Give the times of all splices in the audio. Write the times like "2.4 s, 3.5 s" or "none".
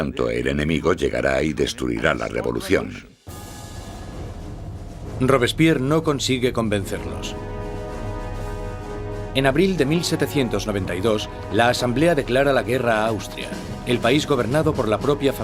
none